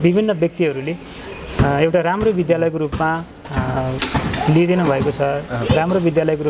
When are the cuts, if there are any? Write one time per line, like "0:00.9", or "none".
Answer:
none